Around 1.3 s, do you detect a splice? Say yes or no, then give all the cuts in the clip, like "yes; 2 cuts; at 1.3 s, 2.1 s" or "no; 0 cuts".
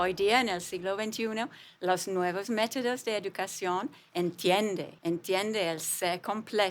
no; 1 cut; at 4.9 s